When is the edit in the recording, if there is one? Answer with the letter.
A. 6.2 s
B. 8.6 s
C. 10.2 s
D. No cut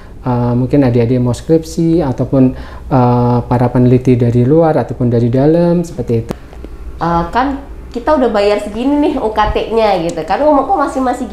A